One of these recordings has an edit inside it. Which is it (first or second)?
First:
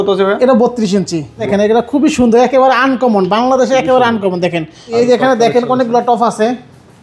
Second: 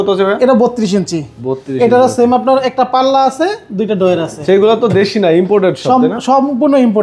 first